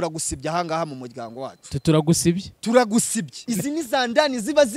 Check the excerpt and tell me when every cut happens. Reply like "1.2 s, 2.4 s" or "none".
3.4 s